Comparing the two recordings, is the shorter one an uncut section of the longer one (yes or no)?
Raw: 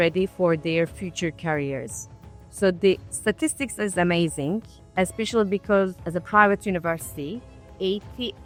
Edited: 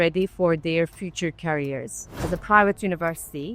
no